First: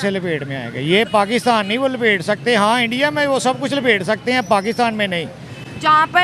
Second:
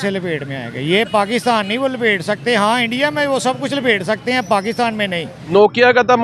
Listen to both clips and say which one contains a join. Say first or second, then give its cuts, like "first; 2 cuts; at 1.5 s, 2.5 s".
second; 1 cut; at 5.4 s